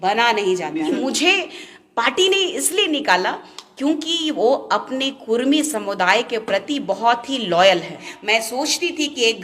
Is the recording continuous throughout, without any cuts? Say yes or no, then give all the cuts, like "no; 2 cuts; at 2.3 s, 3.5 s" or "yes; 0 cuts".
no; 2 cuts; at 0.9 s, 8.1 s